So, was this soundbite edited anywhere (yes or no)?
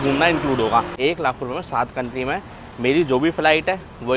yes